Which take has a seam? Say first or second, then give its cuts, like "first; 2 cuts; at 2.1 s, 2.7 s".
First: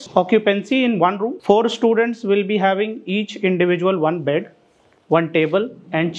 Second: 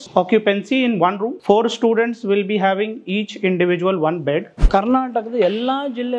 second; 1 cut; at 4.6 s